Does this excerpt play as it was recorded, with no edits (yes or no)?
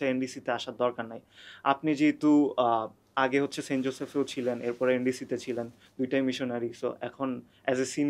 yes